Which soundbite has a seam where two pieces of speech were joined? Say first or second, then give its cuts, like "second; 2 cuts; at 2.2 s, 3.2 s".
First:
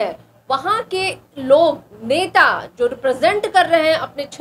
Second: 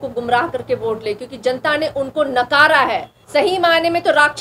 second; 1 cut; at 3.1 s